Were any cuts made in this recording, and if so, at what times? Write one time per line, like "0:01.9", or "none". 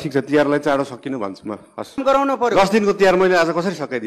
0:02.0